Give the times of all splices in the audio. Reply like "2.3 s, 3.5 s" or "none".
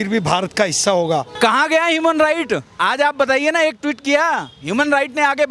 1.3 s